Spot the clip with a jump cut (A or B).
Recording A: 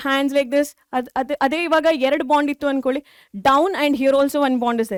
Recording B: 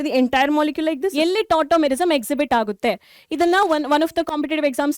B